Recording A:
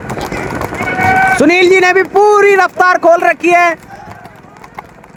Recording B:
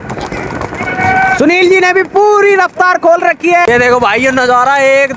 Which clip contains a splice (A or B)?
B